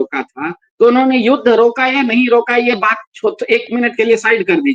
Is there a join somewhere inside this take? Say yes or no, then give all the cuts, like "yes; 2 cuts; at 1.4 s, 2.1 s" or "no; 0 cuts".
no; 0 cuts